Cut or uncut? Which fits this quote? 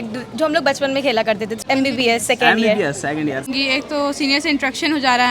cut